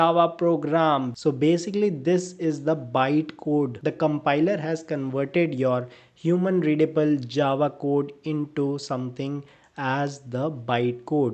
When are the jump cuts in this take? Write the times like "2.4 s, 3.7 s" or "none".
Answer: 1.1 s

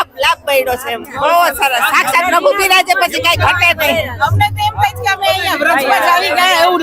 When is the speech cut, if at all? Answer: 1.1 s

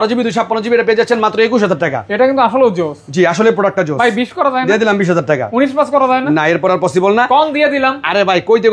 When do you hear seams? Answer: none

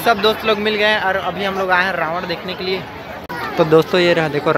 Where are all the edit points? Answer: 3.2 s

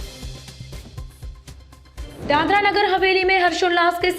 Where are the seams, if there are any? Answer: 2.1 s

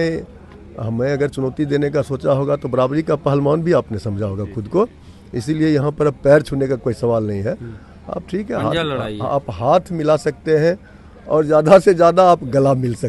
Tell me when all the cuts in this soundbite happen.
none

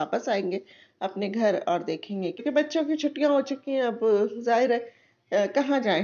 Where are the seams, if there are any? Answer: 2.4 s

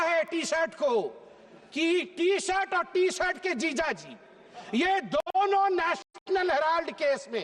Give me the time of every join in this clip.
none

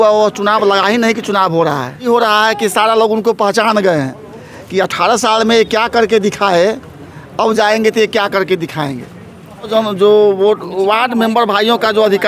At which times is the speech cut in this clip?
2.1 s, 9.7 s

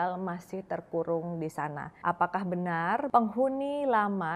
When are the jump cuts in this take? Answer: 3.1 s

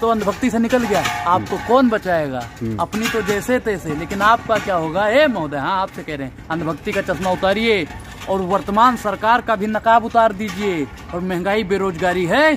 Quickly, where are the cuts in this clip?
none

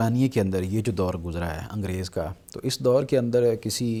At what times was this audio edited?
none

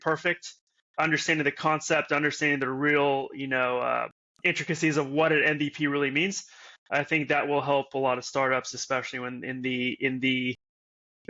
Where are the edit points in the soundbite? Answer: none

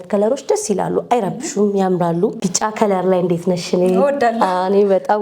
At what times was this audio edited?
2.4 s

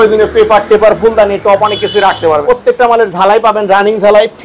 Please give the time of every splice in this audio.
2.4 s

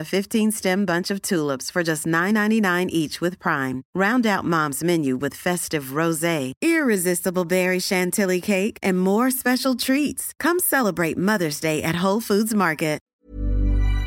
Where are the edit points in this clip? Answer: 13.1 s

